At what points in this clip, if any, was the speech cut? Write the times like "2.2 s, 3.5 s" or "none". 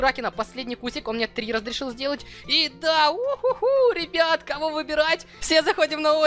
5.4 s